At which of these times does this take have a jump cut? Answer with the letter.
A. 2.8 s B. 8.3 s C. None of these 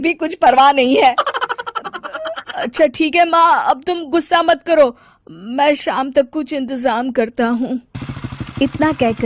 C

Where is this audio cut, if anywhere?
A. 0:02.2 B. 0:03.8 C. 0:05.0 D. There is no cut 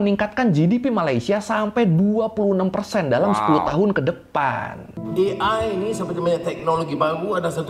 C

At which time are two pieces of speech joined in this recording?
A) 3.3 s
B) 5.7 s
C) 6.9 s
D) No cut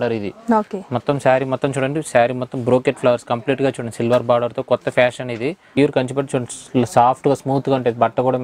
B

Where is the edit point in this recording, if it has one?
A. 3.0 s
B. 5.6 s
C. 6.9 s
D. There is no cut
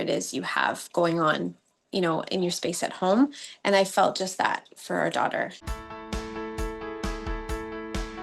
B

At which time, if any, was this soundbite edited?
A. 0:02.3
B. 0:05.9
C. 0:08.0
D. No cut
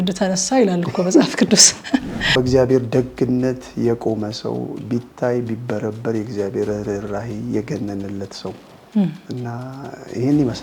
A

